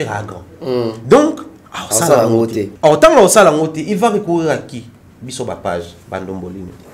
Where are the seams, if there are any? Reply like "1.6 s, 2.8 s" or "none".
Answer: 2.6 s